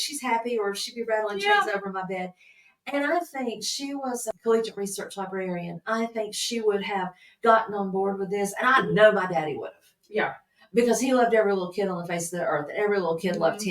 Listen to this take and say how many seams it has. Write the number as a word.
one